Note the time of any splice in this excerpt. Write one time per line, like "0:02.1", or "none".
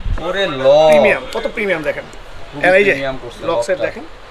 0:02.4